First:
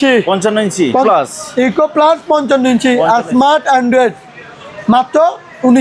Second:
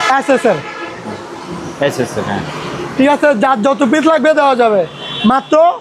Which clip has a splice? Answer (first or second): first